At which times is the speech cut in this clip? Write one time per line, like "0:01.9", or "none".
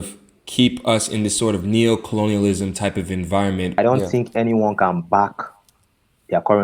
0:03.8